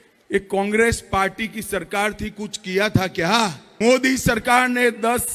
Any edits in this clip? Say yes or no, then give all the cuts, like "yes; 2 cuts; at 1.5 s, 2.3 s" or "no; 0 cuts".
no; 0 cuts